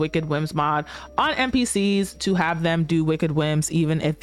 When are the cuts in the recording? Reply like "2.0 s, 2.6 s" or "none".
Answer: none